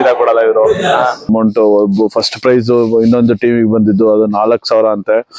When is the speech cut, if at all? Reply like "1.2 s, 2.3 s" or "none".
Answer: 1.3 s